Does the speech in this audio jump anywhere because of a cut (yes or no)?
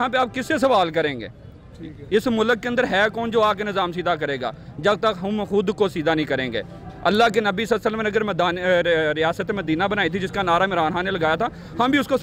no